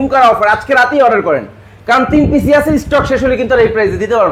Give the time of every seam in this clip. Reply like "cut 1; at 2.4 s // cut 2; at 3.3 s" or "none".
none